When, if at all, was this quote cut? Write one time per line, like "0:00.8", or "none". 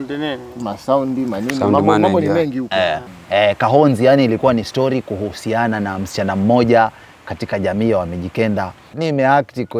0:03.0
0:08.9